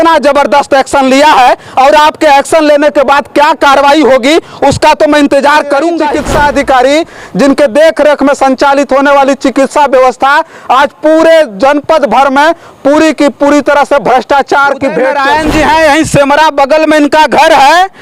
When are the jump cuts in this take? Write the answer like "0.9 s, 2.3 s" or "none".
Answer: 6.1 s, 15.2 s